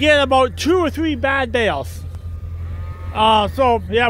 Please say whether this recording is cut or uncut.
uncut